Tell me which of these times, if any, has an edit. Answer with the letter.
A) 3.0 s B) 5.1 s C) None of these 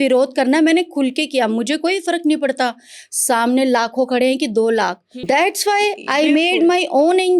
B